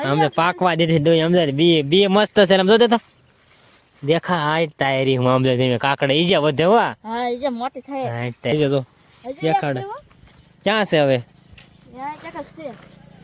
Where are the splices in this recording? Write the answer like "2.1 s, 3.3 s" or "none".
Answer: 8.5 s